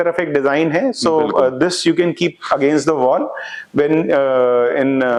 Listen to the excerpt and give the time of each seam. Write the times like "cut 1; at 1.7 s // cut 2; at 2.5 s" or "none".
none